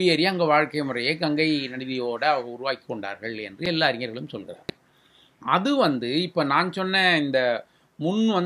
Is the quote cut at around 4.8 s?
no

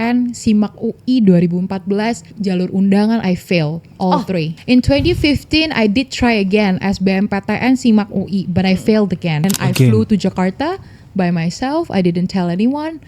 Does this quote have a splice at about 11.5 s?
no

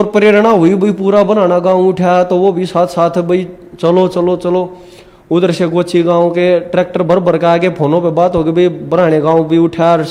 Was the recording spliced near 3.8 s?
no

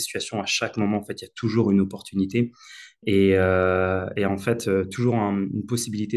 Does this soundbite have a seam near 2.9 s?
no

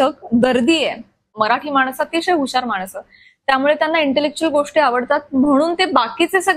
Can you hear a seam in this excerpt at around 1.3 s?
yes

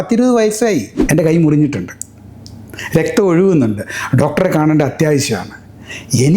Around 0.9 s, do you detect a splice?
yes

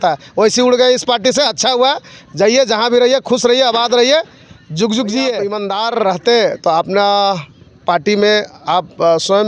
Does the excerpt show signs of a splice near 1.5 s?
no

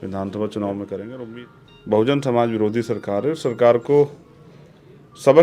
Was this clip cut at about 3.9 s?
no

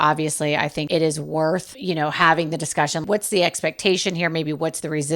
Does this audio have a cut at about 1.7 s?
yes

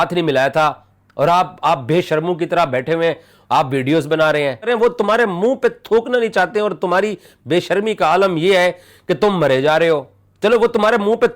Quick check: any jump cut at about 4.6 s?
yes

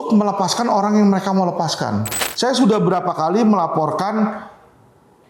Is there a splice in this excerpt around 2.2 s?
yes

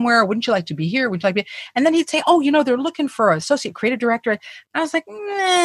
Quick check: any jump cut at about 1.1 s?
no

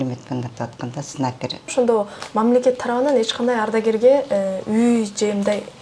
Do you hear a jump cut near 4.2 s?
no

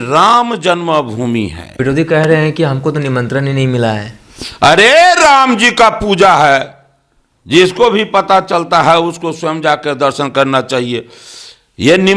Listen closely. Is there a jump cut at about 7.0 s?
no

